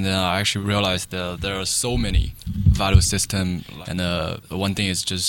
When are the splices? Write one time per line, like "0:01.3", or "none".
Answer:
0:02.3
0:03.7
0:04.4